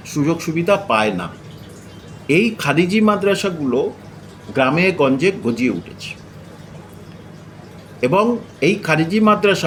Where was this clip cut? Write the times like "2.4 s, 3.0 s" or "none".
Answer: none